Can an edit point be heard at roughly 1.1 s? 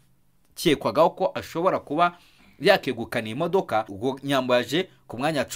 no; 1 cut; at 3.9 s

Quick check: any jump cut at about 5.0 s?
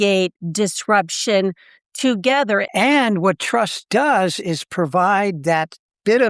no; 1 cut; at 2.7 s

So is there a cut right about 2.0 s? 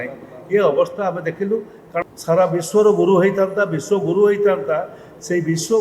yes; 1 cut; at 2.0 s

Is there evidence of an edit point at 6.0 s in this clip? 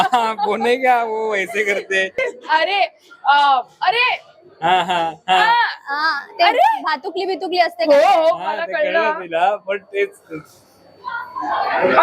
no; 1 cut; at 2.1 s

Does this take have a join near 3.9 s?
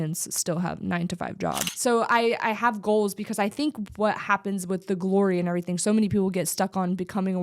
no; 1 cut; at 1.7 s

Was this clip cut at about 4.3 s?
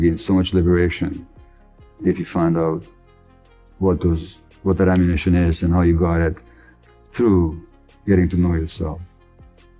no; 1 cut; at 6.5 s

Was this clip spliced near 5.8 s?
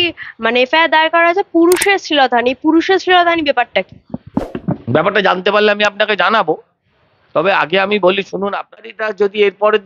no; 1 cut; at 8.8 s

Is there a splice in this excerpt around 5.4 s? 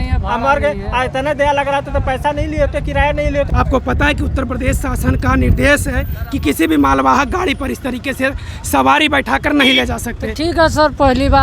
no; 1 cut; at 3.5 s

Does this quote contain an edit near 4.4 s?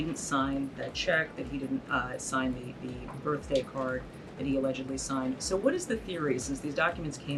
no; 0 cuts

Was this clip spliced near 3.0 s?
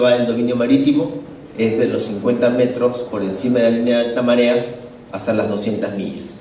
no; 0 cuts

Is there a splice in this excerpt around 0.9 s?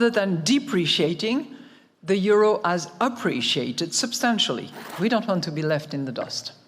no; 1 cut; at 4.8 s

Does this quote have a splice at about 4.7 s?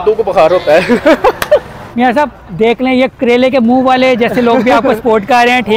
no; 2 cuts; at 1.8 s, 3.1 s

